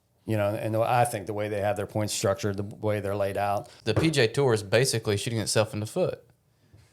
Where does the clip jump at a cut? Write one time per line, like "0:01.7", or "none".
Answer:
0:03.7

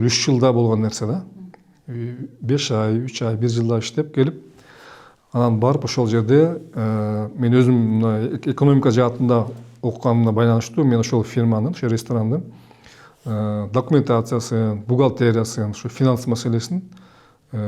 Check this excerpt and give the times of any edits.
none

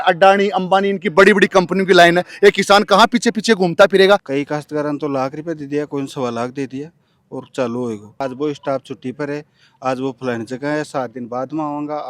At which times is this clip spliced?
0:04.3
0:08.2

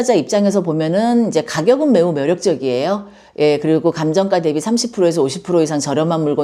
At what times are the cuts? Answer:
none

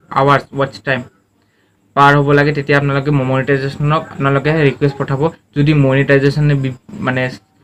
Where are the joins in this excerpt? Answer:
none

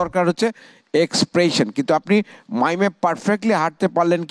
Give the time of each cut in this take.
none

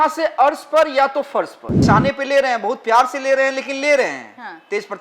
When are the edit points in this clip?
0:01.7

